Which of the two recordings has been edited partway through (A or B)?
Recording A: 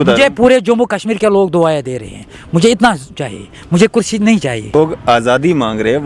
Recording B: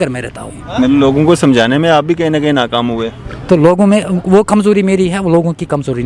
A